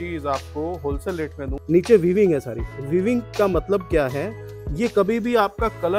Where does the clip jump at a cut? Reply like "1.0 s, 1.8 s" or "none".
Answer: 1.5 s